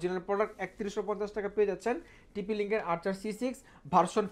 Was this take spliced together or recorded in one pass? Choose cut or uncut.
uncut